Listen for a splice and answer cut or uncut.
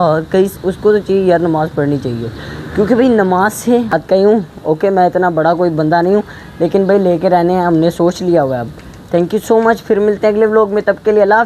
cut